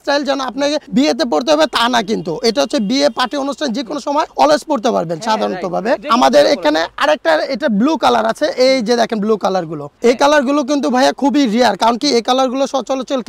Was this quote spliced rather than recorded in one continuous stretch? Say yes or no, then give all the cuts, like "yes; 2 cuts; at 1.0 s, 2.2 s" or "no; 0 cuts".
no; 0 cuts